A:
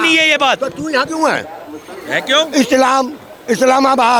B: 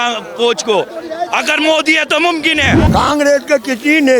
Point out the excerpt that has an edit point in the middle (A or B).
B